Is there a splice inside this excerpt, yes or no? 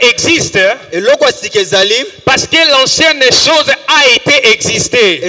no